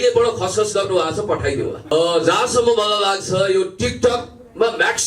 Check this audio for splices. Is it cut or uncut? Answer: uncut